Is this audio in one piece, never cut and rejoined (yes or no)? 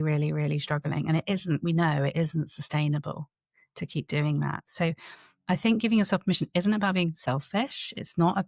yes